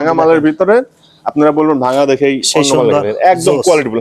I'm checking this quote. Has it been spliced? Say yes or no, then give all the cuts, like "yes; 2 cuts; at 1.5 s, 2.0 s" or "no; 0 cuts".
no; 0 cuts